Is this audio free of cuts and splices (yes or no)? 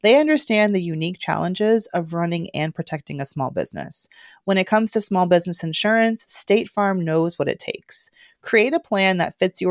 yes